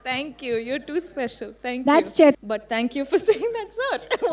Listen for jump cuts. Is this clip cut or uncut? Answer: cut